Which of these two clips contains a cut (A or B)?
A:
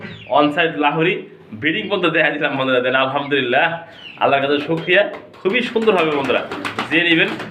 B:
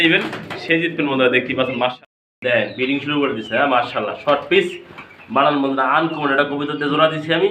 B